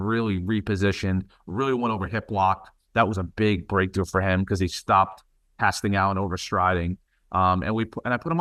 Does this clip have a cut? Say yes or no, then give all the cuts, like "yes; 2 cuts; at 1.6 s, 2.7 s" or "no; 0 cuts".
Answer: no; 0 cuts